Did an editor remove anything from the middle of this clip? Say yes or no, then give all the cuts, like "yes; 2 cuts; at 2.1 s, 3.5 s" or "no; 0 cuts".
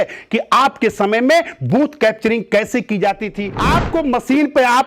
yes; 1 cut; at 3.5 s